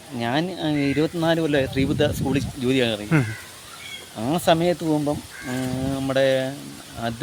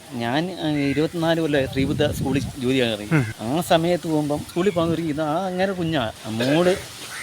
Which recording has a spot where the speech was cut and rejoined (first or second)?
second